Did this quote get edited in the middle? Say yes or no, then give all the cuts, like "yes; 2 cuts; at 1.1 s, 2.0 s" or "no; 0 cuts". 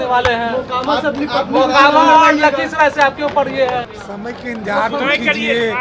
yes; 1 cut; at 3.9 s